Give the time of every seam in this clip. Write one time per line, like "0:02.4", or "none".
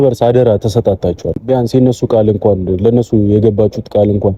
0:01.4